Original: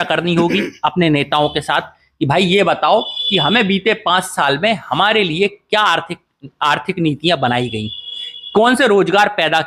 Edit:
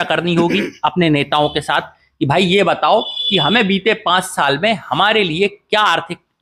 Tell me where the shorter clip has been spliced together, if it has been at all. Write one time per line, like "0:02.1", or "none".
none

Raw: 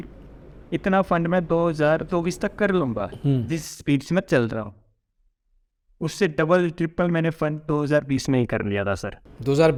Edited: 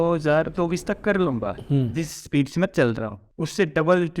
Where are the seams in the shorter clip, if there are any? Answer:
0:03.2

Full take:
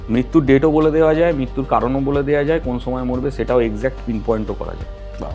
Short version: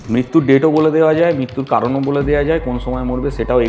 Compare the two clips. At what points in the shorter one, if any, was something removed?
none

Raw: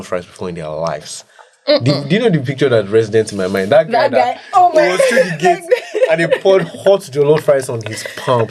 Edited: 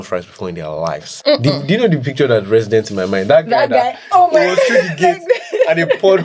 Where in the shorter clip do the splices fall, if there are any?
0:01.1

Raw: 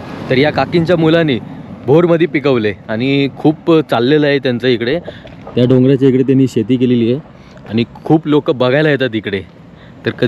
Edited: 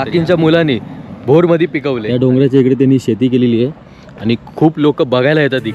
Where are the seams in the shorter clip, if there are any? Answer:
0:02.0

